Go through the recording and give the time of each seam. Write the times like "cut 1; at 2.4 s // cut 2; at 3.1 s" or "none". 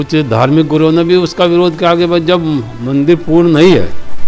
none